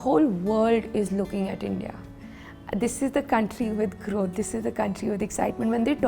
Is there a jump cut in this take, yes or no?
no